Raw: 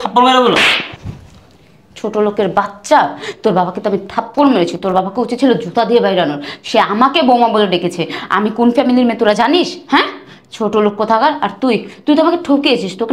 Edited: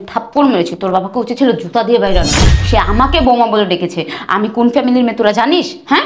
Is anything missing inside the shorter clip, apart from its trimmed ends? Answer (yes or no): no